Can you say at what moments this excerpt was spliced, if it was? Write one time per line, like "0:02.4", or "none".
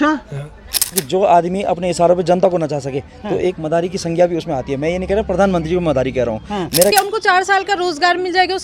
0:01.0
0:06.9